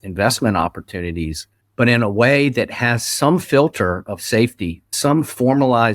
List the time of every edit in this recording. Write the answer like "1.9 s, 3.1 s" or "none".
4.9 s